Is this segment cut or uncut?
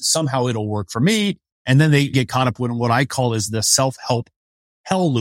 cut